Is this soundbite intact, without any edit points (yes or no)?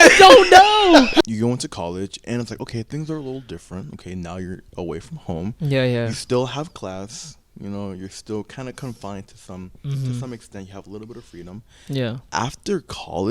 no